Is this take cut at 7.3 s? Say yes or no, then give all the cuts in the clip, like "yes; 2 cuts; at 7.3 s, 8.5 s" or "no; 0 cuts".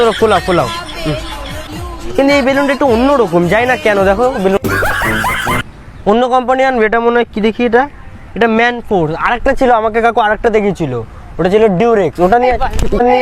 no; 2 cuts; at 1.6 s, 5.7 s